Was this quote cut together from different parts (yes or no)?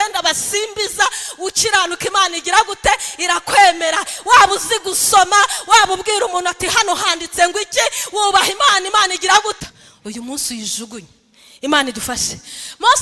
yes